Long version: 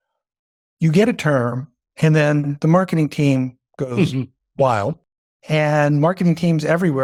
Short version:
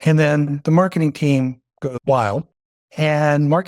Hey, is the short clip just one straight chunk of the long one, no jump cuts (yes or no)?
no